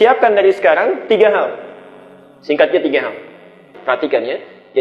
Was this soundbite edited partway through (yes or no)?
yes